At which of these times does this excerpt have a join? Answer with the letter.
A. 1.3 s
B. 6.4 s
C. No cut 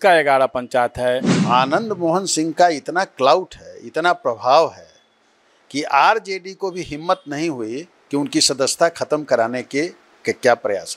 A